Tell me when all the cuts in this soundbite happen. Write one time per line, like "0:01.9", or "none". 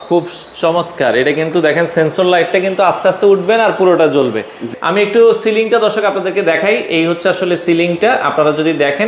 0:04.7